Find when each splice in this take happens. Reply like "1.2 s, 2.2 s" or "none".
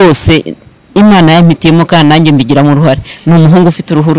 none